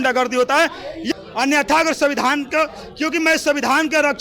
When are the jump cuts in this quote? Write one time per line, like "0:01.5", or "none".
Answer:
0:01.1